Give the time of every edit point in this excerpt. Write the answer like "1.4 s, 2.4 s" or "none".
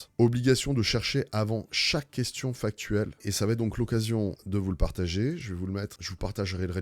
3.2 s, 4.4 s, 6.0 s